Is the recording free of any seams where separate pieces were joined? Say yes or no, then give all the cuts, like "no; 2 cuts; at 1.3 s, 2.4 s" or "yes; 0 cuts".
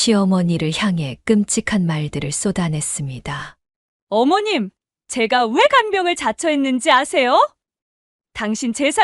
yes; 0 cuts